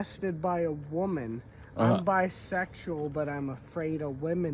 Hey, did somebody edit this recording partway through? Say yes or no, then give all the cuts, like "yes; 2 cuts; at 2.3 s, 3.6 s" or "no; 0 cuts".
no; 0 cuts